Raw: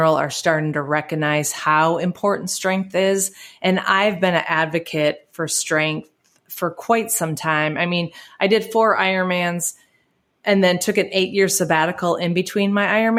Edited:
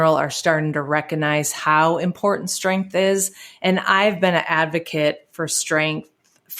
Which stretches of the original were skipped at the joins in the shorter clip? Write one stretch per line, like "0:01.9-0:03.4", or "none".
none